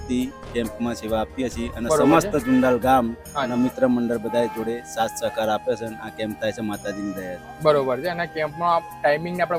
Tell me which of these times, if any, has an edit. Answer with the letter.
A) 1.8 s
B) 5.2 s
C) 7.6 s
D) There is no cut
D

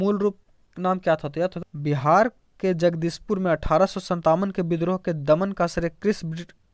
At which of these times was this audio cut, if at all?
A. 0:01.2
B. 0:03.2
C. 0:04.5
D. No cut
A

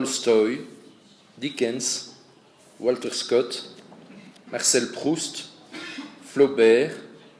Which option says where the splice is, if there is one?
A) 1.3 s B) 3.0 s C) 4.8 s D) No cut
C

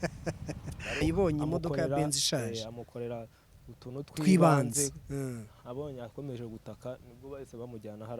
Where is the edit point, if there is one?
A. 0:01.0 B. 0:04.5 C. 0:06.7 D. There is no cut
A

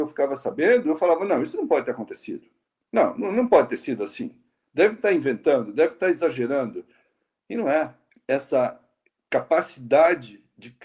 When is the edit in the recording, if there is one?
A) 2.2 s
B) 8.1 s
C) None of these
B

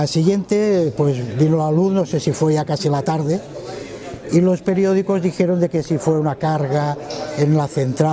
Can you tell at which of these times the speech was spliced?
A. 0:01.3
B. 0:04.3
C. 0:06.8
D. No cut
B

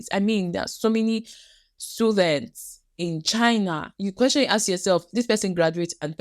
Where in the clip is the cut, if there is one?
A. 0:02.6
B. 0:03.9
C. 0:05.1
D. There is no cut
B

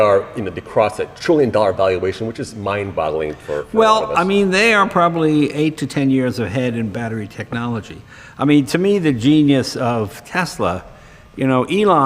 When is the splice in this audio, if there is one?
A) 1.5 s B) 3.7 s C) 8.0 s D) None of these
C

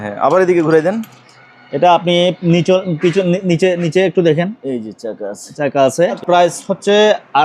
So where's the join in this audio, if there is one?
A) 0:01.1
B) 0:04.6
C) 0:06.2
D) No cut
C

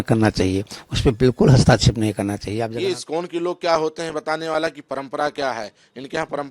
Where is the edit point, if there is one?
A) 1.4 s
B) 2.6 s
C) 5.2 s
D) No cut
B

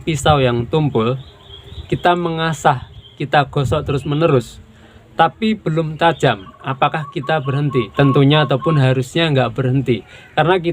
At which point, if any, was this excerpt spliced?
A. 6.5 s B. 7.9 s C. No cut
B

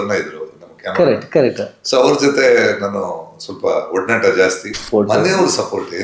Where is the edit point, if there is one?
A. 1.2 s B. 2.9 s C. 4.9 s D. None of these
C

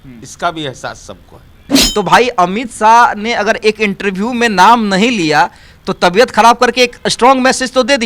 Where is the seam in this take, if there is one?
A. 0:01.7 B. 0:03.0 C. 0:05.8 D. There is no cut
A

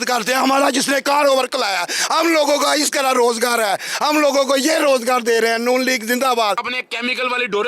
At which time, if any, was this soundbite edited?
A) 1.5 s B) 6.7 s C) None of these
B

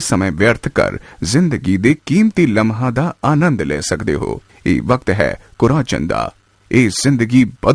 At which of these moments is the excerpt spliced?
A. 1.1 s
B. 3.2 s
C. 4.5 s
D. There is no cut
C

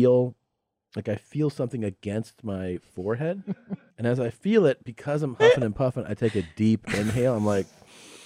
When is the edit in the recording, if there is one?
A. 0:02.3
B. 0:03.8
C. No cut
B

